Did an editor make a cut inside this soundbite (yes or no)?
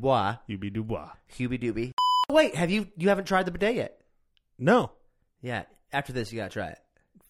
yes